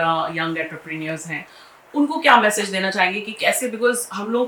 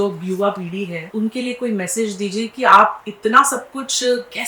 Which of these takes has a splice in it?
second; 1 cut; at 1.0 s

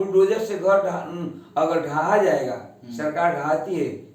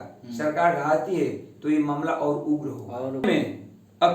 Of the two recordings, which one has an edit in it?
second; 1 cut; at 3.2 s

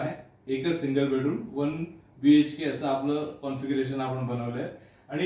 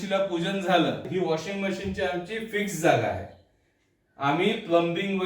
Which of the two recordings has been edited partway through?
second; 1 cut; at 1.1 s

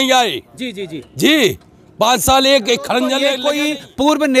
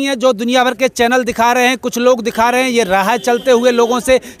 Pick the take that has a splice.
first; 1 cut; at 3.3 s

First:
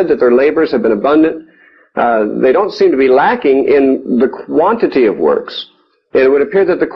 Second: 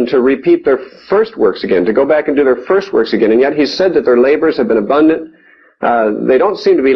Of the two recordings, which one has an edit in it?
second; 1 cut; at 1.3 s

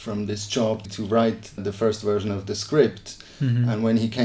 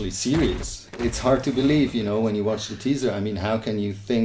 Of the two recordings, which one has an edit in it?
second; 1 cut; at 1.0 s

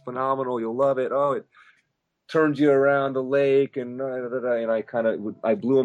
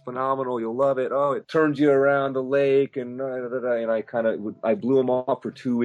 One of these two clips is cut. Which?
second; 1 cut; at 1.4 s

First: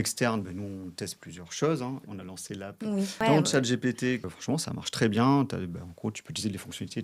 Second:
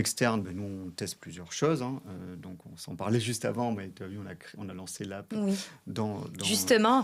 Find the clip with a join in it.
first; 3 cuts; at 2.1 s, 3.2 s, 4.3 s

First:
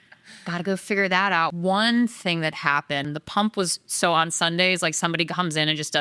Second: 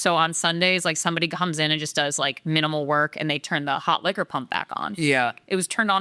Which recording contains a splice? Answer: first; 2 cuts; at 1.5 s, 3.1 s

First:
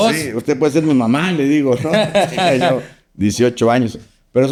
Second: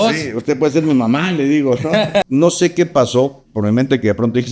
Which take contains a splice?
second; 1 cut; at 2.3 s

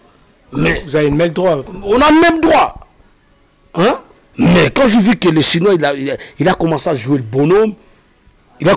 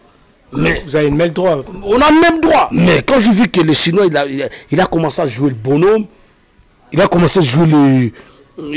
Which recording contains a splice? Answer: second; 1 cut; at 2.7 s

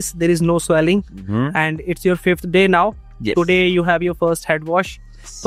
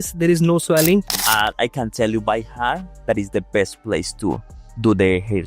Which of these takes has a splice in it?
second; 1 cut; at 1.1 s

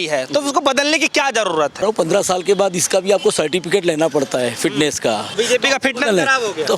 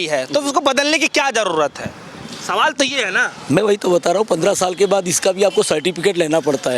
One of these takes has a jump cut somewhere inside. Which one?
first; 2 cuts; at 1.8 s, 5.3 s

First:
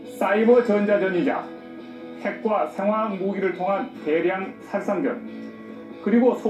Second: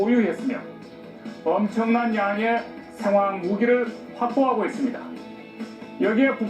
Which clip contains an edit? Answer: second; 1 cut; at 5.2 s

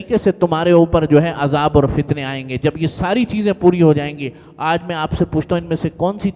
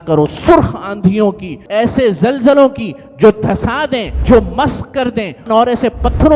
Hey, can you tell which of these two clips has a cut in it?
second; 3 cuts; at 1.5 s, 4.2 s, 5.5 s

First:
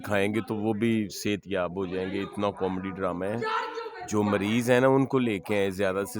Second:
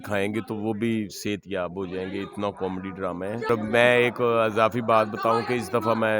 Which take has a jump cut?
second; 1 cut; at 3.5 s

